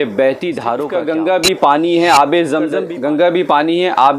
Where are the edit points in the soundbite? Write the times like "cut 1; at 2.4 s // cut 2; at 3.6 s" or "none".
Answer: cut 1; at 0.9 s // cut 2; at 2.8 s